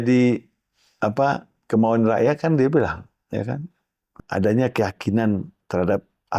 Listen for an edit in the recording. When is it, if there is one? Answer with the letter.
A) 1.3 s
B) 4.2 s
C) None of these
B